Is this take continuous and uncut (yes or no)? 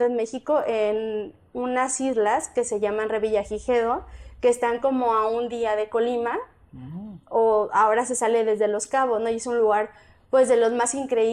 yes